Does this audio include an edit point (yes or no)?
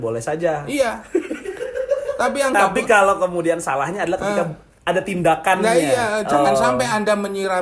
no